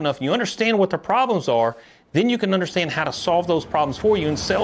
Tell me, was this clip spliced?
no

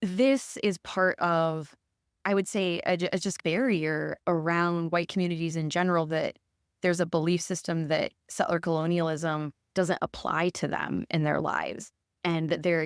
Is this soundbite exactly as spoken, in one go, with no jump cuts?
yes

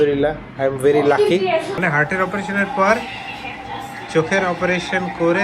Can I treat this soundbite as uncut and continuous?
no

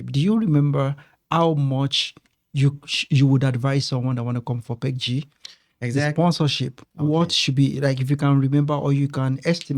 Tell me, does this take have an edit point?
no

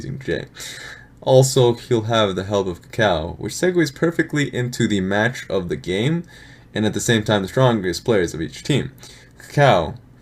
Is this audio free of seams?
no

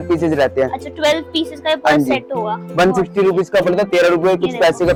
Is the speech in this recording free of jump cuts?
yes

